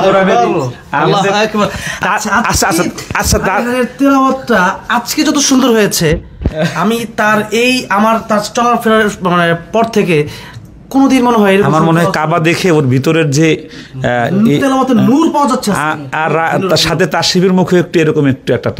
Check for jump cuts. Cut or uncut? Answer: uncut